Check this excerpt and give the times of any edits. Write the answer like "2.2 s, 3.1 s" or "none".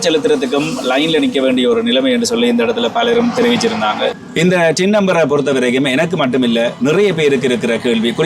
4.2 s